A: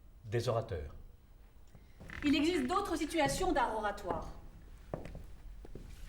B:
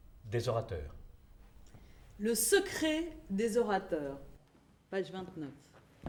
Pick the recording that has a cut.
A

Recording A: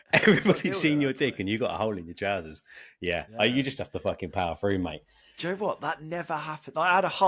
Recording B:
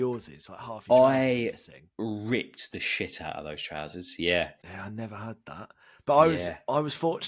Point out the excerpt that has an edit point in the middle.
B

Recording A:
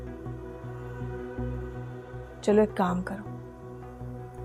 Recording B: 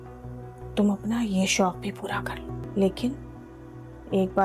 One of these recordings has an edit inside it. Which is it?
B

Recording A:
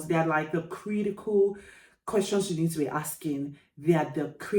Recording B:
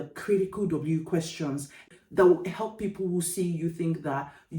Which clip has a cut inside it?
B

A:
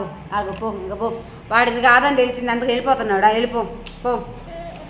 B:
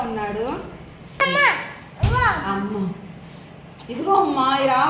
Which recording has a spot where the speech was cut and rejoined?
B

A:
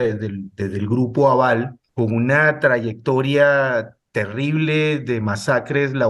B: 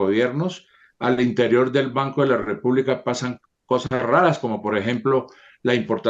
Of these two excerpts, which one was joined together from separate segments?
A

